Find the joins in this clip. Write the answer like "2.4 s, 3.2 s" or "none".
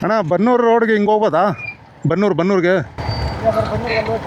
none